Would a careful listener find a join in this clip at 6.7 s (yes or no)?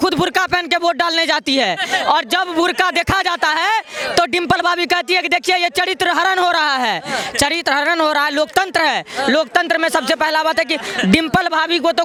no